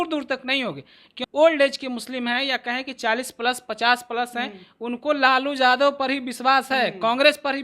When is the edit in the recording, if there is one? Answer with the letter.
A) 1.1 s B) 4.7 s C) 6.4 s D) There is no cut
A